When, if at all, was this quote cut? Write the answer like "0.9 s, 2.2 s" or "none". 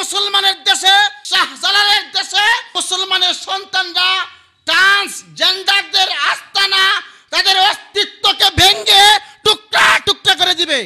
1.2 s, 2.8 s